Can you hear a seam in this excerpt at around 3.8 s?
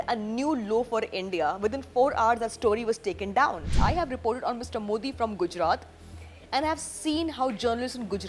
yes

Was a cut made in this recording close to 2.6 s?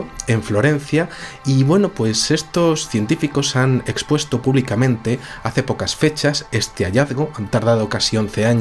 yes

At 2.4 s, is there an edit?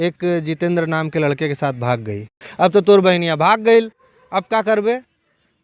yes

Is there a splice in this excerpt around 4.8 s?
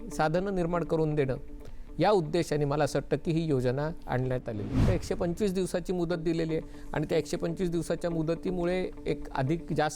yes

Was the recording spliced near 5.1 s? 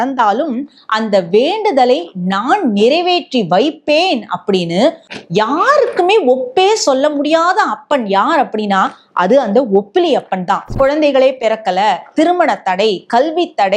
yes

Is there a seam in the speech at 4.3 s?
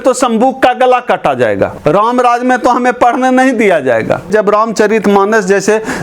yes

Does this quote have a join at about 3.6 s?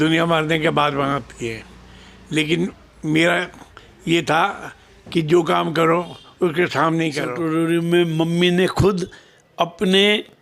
no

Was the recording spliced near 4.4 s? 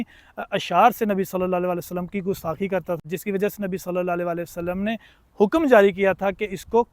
no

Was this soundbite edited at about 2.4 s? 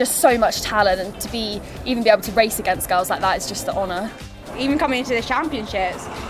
no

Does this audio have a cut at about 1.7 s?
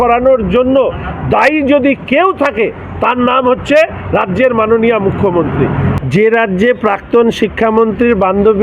no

